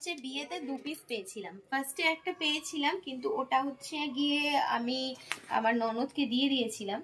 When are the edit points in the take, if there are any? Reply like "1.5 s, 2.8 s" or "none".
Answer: none